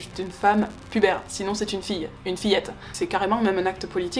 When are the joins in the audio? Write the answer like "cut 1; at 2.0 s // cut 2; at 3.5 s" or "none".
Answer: cut 1; at 2.8 s